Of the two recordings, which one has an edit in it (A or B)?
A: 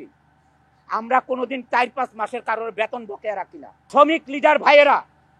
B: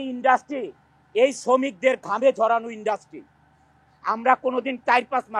A